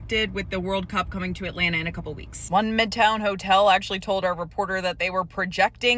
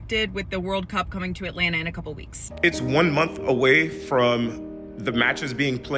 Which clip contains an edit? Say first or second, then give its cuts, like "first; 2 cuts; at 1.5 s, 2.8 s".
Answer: second; 1 cut; at 2.4 s